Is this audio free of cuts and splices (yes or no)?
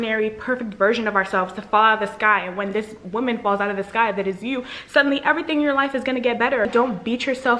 yes